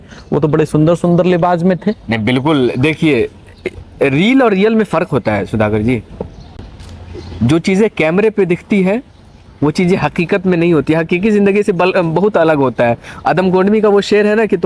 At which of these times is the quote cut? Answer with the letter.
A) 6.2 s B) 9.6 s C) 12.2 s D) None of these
D